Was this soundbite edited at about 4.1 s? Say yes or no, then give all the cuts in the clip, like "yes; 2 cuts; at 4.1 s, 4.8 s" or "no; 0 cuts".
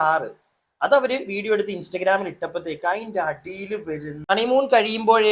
yes; 1 cut; at 4.1 s